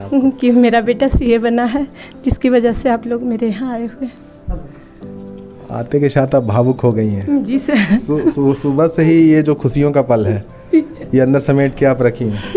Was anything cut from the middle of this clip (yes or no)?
no